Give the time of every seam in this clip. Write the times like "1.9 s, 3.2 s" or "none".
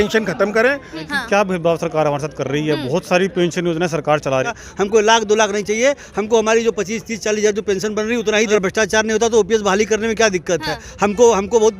1.0 s, 4.7 s, 8.6 s